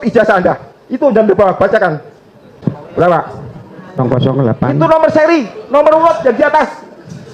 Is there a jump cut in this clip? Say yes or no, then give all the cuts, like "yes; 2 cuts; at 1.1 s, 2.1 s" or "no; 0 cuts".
yes; 2 cuts; at 2.5 s, 4.0 s